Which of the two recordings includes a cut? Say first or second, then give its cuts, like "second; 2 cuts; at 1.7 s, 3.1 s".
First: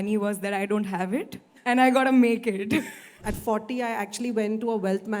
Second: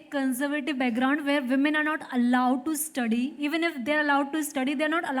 first; 2 cuts; at 1.4 s, 3.1 s